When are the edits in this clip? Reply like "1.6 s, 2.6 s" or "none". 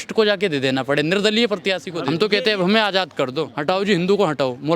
1.9 s, 3.5 s